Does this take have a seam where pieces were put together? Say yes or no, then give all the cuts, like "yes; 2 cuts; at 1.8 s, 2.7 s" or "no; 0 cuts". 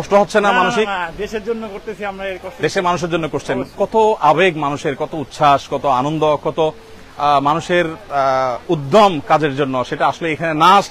no; 0 cuts